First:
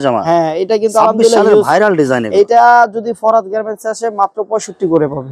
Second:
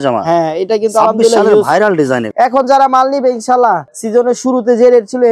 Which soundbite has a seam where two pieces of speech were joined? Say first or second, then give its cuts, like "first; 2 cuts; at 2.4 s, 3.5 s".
second; 1 cut; at 2.3 s